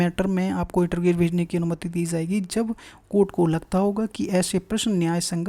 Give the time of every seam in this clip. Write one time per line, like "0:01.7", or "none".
none